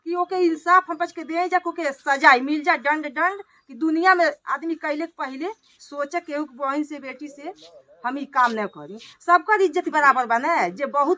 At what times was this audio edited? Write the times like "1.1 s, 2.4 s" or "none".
none